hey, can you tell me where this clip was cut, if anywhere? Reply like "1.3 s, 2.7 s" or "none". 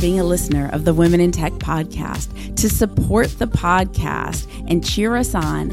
none